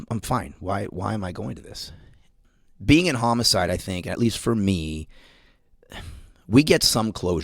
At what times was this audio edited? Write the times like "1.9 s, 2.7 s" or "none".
2.2 s